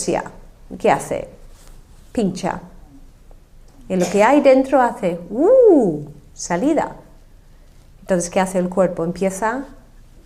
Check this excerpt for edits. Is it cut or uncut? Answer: uncut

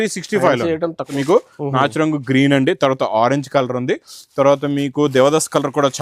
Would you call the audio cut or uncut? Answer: cut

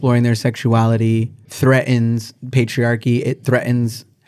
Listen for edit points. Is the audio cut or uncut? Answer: uncut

